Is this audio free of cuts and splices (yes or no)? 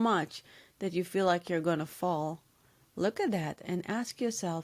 no